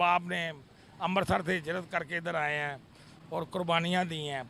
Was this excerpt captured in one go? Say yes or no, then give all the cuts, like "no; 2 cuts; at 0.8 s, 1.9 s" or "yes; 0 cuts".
yes; 0 cuts